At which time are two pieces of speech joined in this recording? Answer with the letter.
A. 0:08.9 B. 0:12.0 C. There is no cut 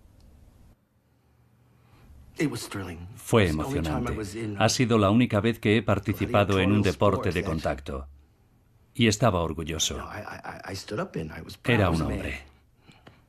C